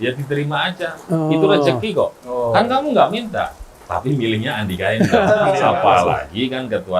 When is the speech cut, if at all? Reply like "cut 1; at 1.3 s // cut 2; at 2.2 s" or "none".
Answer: cut 1; at 5.6 s